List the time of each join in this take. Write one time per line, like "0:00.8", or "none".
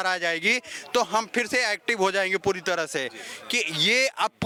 none